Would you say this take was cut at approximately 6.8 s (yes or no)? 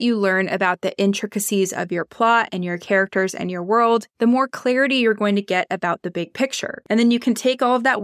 yes